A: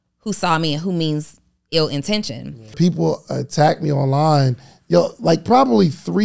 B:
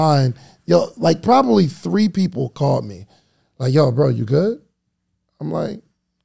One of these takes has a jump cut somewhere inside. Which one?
A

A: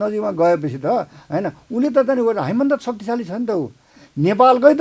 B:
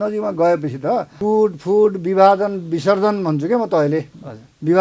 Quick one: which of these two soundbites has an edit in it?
B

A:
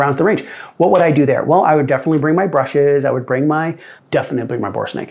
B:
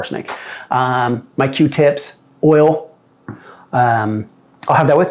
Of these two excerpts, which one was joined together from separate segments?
A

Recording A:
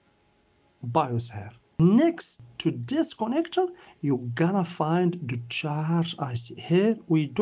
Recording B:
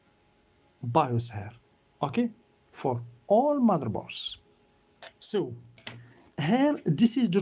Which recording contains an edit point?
A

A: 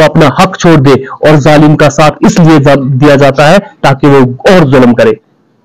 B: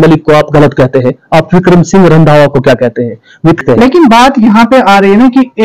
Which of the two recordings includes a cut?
B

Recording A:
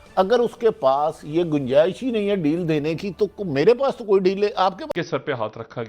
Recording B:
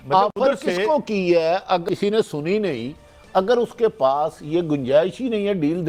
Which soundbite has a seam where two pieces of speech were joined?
A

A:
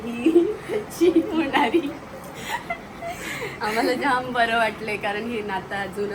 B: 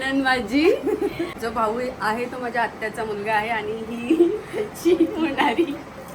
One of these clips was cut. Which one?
B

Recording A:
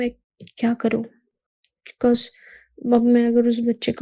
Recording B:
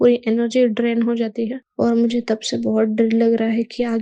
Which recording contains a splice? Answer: B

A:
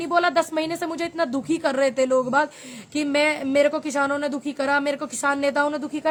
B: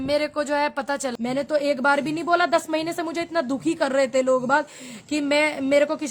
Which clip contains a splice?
B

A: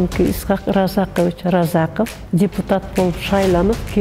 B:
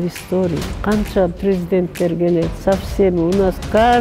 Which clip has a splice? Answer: A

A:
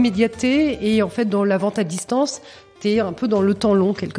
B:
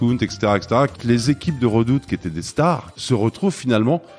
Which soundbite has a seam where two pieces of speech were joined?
B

